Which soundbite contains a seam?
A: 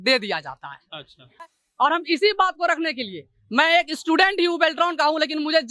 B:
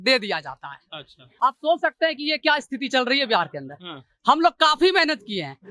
A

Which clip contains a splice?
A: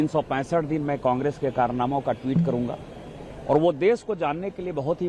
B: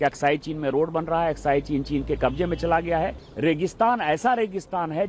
B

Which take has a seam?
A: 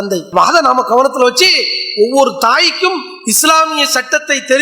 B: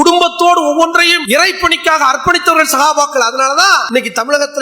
B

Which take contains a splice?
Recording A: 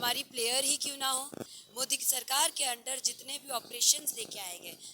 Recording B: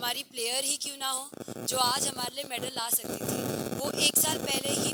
A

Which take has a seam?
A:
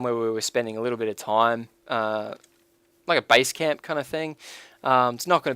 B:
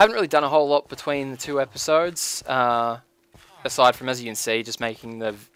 A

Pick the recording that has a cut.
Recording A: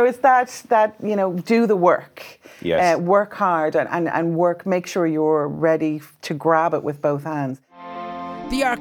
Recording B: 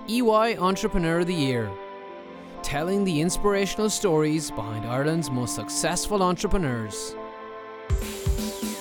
A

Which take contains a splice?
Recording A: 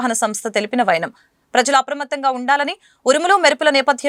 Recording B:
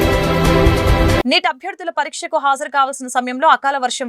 B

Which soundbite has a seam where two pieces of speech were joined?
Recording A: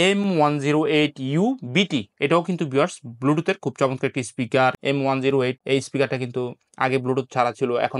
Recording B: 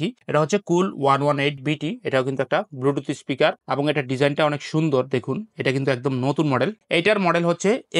B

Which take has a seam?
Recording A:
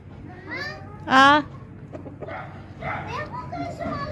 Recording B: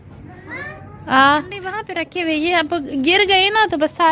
B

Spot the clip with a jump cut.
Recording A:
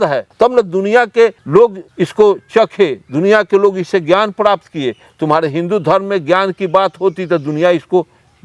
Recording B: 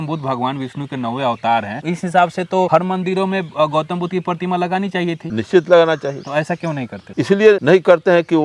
B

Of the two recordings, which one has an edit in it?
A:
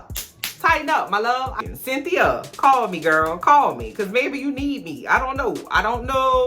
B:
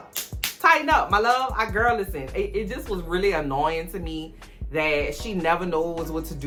A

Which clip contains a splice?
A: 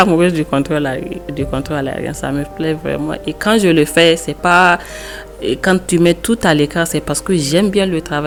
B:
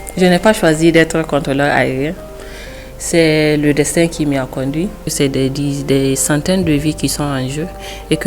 B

